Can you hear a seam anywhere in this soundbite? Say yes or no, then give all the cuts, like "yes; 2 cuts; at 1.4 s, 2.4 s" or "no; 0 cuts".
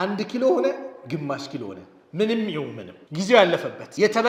no; 0 cuts